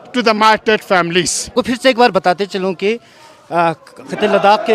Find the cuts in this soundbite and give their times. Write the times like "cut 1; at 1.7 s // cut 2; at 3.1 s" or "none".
cut 1; at 1.5 s